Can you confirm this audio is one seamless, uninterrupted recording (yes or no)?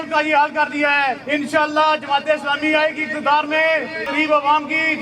no